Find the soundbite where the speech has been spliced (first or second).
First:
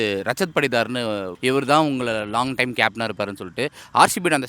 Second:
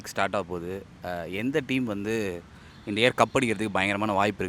first